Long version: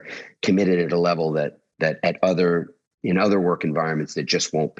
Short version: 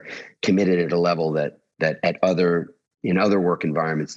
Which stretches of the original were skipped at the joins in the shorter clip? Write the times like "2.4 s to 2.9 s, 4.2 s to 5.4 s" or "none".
none

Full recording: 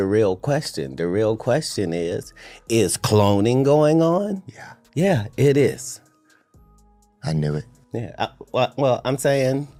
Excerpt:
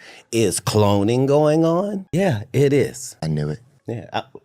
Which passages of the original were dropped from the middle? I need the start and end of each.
4.4 s to 4.8 s, 5.9 s to 7.1 s

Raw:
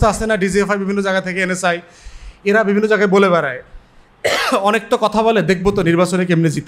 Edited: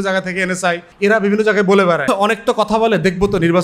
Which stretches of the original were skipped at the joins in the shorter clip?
1.9 s to 2.3 s, 3.5 s to 4.5 s

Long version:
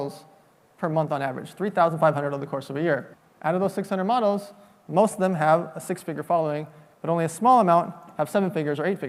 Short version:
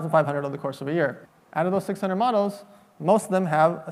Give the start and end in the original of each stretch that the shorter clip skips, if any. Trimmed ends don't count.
none

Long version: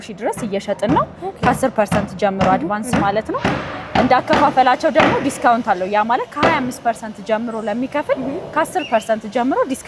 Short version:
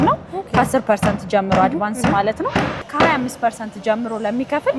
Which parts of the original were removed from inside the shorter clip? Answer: 3.8 s to 6.3 s

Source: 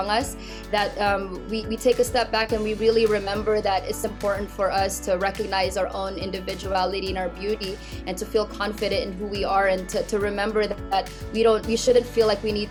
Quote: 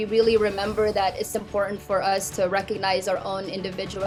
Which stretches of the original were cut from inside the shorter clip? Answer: none

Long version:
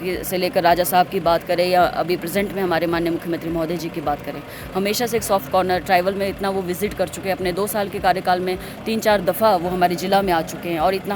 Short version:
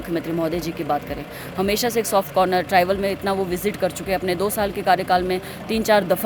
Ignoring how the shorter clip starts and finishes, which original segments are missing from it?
none

